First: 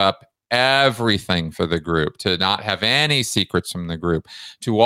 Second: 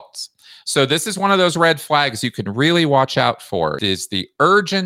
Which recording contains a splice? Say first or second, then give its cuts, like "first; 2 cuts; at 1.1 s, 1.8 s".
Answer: second; 1 cut; at 3.8 s